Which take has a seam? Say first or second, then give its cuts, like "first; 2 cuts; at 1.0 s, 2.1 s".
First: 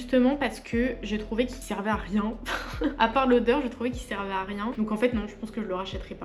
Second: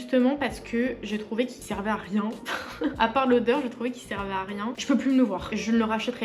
second; 1 cut; at 4.7 s